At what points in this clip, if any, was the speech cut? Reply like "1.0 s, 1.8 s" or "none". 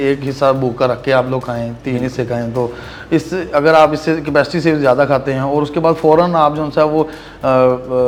none